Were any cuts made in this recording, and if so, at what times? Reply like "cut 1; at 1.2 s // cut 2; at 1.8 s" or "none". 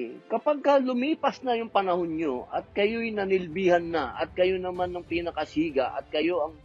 none